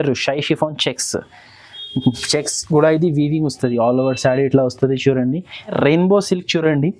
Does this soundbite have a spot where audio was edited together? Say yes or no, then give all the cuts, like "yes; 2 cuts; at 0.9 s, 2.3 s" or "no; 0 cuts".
yes; 1 cut; at 5.7 s